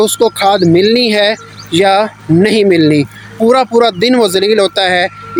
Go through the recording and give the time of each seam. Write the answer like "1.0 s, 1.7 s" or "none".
none

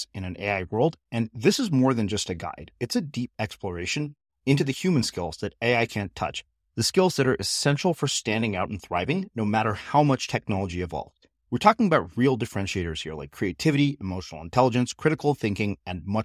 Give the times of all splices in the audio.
none

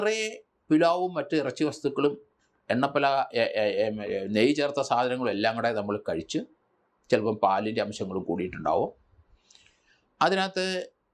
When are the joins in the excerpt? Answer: none

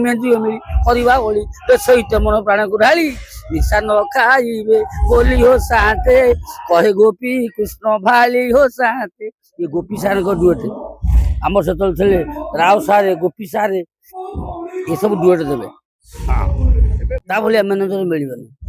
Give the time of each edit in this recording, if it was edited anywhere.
17.2 s

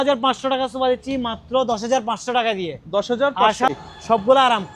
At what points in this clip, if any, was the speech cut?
3.7 s

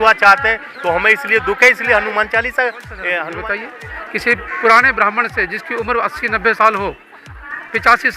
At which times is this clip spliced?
3.3 s

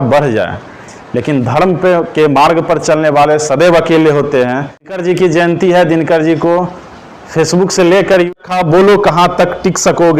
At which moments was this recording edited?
5.0 s, 8.4 s

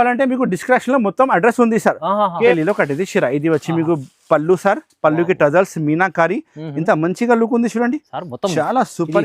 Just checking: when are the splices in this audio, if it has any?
2.5 s

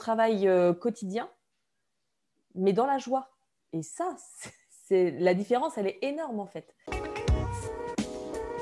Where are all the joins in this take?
6.7 s

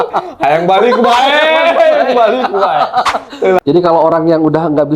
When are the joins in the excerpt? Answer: 3.6 s

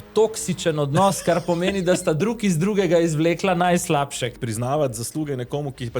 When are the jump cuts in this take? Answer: 4.3 s

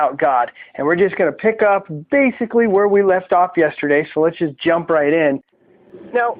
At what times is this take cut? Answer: none

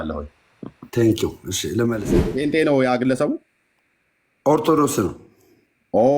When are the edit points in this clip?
1.9 s

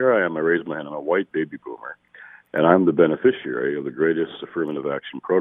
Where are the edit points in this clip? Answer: none

